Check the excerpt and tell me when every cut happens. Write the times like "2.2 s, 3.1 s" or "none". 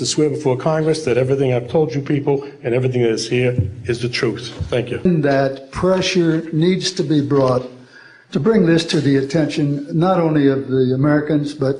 5.1 s